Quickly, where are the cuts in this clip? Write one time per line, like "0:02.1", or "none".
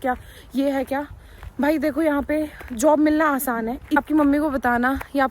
0:04.0